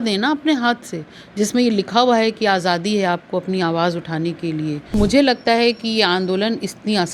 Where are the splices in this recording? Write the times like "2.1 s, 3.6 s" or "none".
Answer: 4.9 s